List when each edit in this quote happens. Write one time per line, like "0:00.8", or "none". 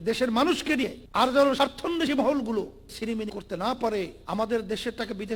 0:01.0
0:02.9
0:04.2